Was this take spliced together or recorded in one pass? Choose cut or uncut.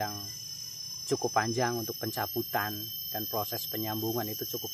uncut